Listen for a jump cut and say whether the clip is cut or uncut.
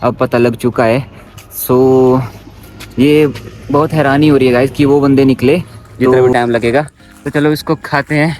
cut